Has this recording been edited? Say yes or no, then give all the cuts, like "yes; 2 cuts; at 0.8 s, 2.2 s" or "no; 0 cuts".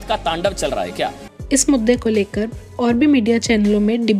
no; 0 cuts